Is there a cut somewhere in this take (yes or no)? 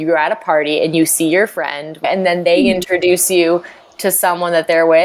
yes